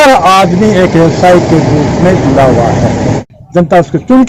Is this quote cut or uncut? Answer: cut